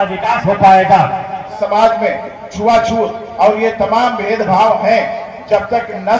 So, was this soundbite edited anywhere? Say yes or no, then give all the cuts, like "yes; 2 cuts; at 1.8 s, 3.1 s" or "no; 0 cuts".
yes; 1 cut; at 1.5 s